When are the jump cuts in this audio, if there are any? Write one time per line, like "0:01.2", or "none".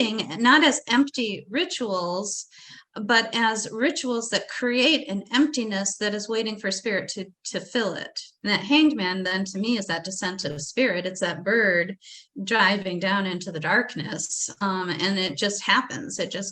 0:08.3